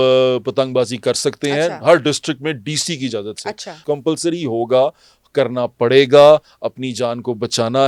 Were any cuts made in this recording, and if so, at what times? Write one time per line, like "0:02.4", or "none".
0:03.8

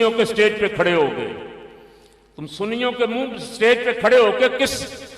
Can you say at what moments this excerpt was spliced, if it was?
none

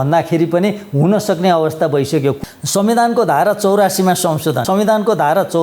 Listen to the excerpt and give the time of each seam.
0:02.4
0:04.6

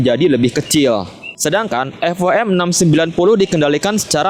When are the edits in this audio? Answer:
none

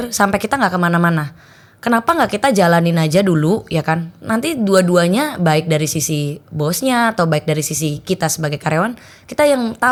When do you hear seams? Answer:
none

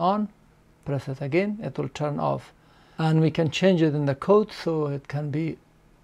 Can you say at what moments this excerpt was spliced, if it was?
none

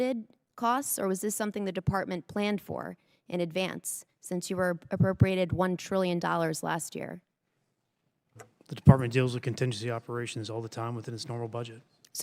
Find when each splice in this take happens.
none

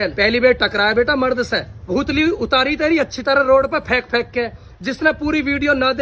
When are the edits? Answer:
0:01.9

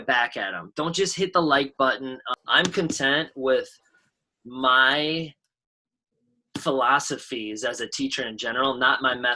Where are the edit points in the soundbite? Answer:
0:02.3

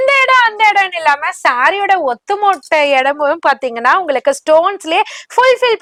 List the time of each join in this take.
none

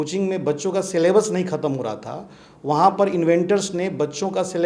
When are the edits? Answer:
none

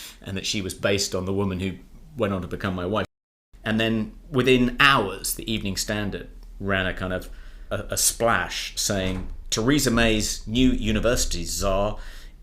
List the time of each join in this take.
0:03.2
0:07.7

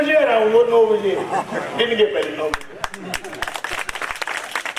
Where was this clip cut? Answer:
none

